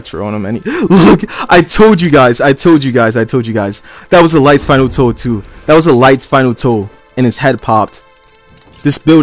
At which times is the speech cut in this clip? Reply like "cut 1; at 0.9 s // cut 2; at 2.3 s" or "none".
none